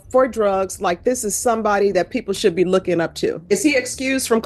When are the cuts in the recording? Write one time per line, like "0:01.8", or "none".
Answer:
0:03.4